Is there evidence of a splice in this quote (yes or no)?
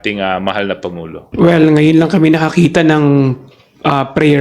yes